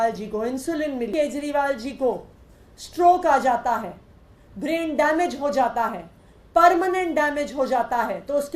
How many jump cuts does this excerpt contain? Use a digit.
1